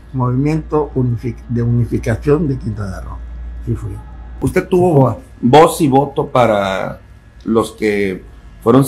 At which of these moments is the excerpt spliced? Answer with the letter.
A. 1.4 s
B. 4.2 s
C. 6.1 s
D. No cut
B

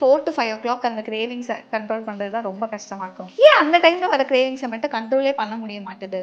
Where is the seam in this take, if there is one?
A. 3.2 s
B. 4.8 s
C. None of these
A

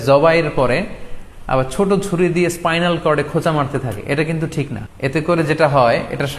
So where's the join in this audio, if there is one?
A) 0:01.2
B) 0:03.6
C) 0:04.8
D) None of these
C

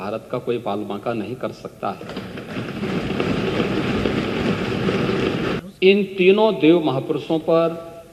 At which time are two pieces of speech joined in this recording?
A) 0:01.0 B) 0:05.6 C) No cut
B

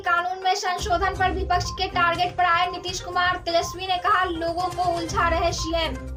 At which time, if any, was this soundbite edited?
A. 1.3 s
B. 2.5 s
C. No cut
C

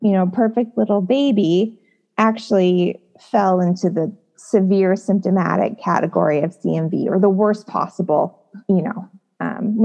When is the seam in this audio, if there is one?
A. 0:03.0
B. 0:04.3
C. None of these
C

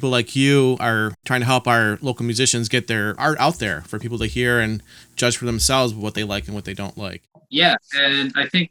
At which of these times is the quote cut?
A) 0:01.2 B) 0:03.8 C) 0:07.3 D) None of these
C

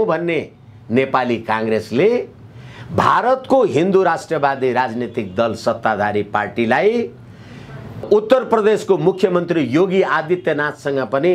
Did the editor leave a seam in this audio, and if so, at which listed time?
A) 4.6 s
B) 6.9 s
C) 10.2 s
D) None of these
D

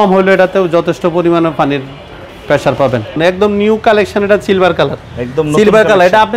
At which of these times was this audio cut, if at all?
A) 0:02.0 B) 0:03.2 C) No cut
B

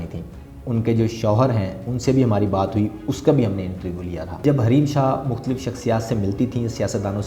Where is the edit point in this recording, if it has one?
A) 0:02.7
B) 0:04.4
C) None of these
B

